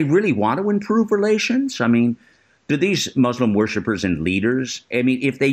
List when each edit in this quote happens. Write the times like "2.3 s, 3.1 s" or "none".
none